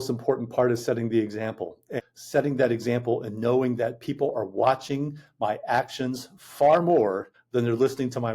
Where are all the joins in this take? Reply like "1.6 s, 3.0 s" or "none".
2.0 s, 7.3 s